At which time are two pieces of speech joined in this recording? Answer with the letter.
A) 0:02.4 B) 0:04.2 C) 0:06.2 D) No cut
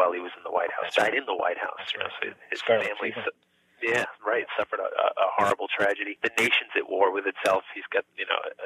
C